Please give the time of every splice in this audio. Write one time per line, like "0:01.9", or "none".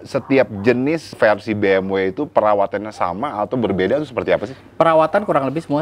0:01.1
0:04.6